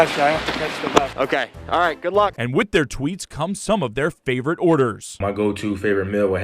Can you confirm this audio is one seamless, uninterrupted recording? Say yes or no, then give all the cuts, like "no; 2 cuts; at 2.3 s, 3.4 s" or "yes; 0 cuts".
no; 1 cut; at 2.4 s